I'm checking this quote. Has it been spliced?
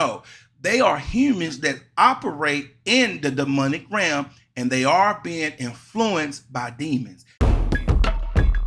yes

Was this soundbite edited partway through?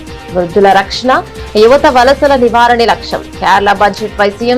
no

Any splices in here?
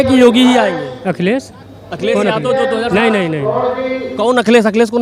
no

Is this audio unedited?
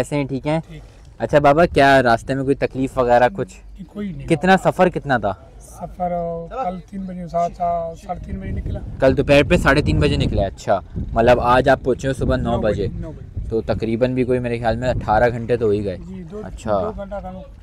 yes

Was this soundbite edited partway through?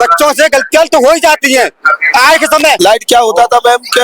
yes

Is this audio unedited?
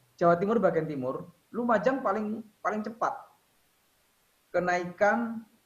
yes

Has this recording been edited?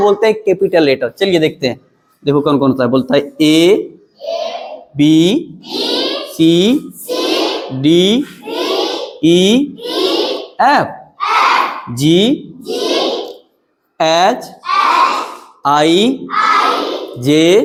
no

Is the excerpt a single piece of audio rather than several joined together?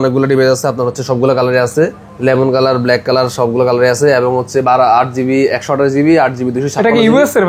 yes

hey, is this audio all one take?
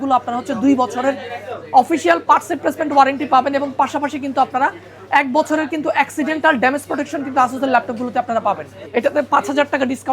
no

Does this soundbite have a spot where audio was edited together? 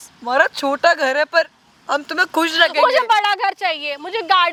no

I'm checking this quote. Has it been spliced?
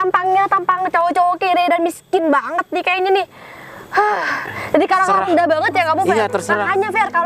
no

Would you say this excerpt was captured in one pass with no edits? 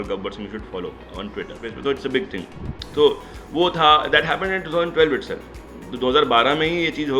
no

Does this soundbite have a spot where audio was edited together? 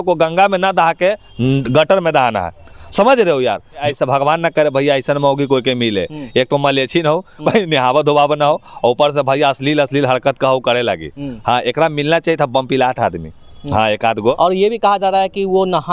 yes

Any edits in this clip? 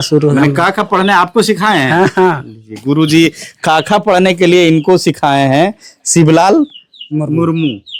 no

